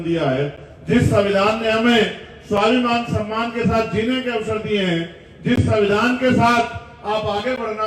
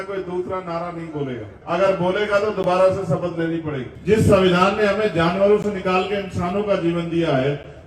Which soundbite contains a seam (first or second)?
second